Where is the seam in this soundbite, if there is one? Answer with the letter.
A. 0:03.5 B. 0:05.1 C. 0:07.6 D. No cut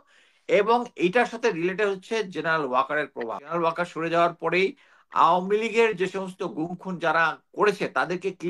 A